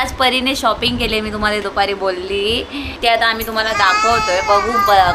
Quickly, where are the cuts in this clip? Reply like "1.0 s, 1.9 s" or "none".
2.8 s